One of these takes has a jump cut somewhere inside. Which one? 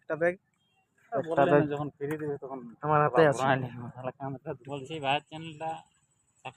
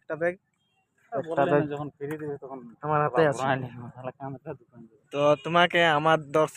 first; 1 cut; at 4.6 s

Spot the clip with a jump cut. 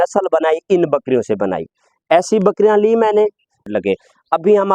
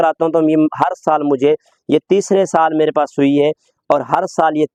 first; 1 cut; at 3.7 s

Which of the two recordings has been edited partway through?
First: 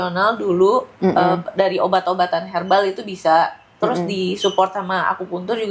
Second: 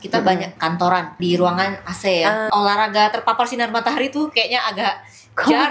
second; 2 cuts; at 0.9 s, 2.5 s

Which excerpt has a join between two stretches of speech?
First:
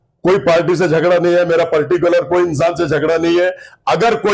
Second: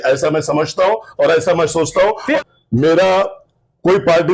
second; 1 cut; at 2.4 s

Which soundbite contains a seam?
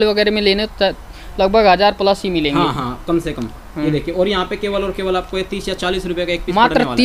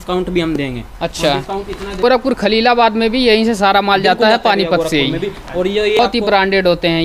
second; 2 cuts; at 2.0 s, 6.0 s

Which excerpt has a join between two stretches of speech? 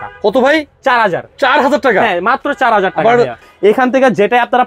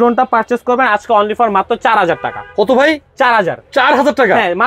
first; 1 cut; at 3.4 s

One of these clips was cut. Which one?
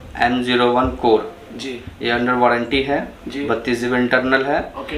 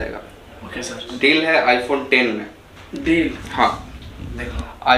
second; 1 cut; at 1.1 s

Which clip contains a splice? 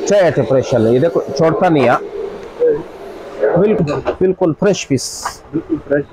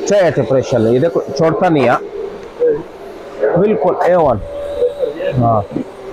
first; 1 cut; at 3.8 s

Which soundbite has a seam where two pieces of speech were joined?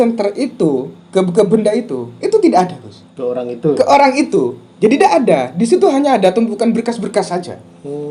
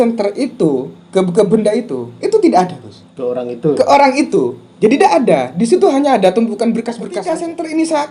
second; 1 cut; at 7.1 s

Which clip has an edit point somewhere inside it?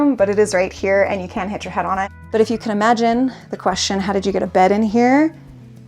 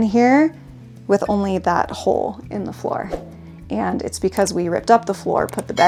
first; 1 cut; at 2.2 s

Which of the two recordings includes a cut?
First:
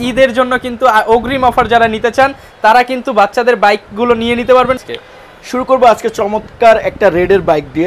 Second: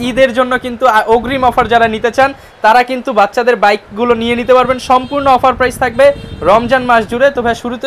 first; 1 cut; at 4.8 s

